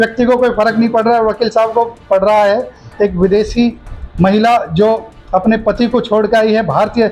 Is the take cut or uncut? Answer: uncut